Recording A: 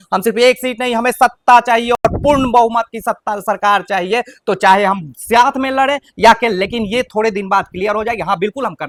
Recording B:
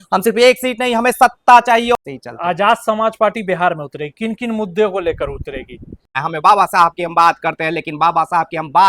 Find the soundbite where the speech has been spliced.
B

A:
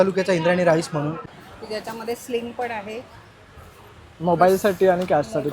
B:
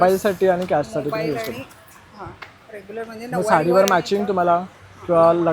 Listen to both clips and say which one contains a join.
A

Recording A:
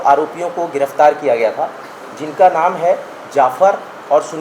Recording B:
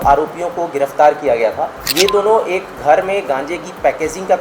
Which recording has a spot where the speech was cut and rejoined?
B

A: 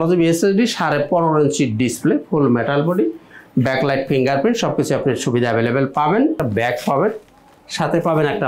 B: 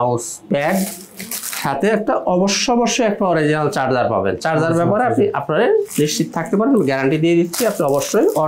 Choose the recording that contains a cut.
A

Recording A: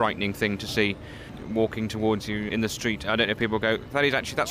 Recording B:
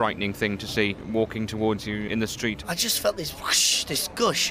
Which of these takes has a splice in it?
B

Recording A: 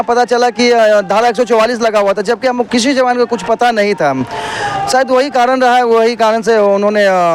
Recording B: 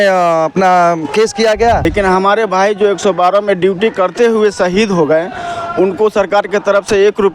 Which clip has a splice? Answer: B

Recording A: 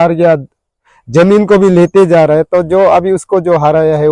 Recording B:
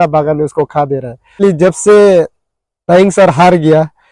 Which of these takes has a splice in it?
B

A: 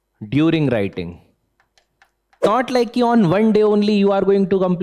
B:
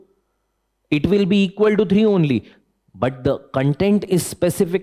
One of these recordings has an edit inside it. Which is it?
A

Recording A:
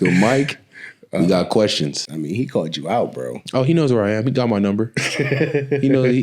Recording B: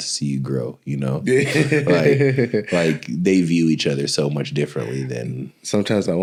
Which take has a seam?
A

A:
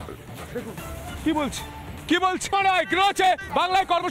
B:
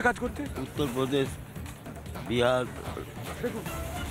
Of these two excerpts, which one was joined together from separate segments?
A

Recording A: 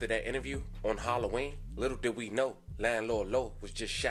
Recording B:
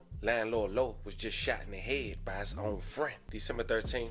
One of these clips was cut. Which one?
B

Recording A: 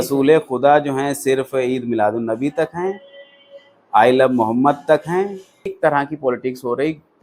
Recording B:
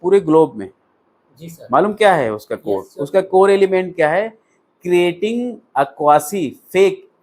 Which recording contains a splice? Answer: A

